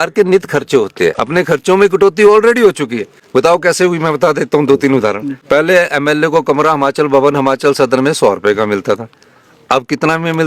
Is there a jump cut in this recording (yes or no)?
yes